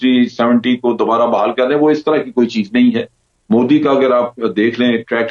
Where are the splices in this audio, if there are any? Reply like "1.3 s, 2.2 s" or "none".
none